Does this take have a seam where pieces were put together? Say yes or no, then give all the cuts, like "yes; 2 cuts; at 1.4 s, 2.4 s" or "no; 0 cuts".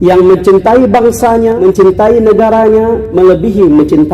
yes; 2 cuts; at 1.6 s, 3.0 s